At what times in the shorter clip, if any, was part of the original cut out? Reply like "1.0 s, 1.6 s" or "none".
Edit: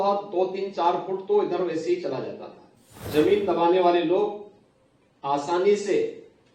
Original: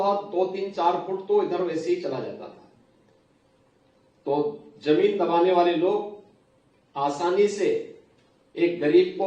3.0 s